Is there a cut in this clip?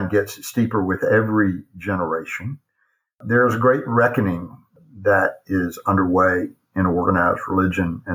no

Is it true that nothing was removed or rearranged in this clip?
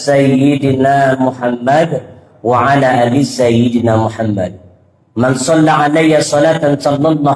yes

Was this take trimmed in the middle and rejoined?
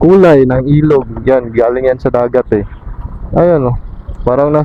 no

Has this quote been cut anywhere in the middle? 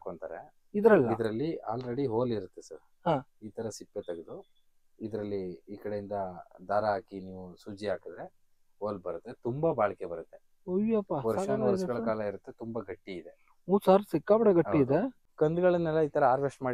yes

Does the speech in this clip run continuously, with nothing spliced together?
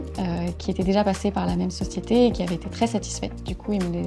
yes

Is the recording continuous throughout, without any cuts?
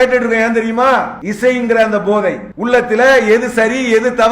no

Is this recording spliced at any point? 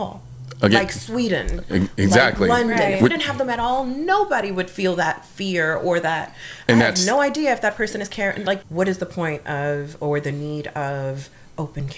yes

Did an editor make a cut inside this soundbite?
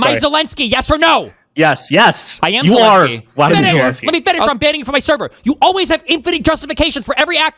yes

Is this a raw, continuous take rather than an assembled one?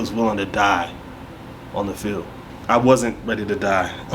no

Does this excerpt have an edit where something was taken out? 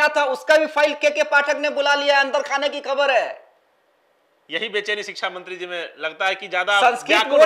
no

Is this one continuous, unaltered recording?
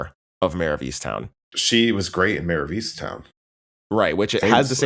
no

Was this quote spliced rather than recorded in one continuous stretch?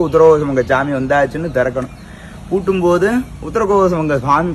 no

